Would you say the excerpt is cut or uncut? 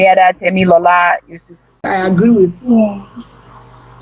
cut